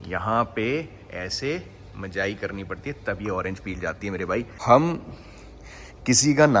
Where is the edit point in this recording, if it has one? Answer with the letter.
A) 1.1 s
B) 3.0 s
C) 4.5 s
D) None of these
C